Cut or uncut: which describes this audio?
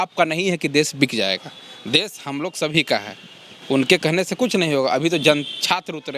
uncut